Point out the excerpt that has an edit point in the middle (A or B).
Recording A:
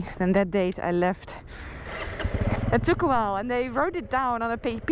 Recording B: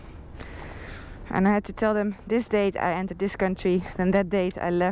A